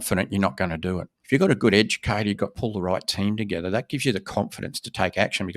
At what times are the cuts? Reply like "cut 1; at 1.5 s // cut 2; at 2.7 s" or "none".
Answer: cut 1; at 1.1 s // cut 2; at 2.5 s